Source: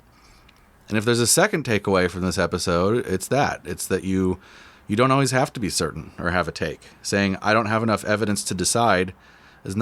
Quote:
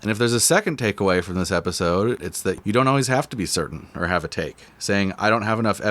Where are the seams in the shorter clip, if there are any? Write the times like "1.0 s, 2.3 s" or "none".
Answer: 2.2 s